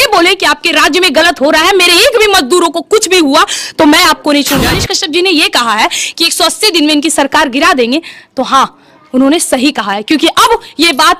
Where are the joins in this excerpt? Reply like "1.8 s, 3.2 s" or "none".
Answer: 4.8 s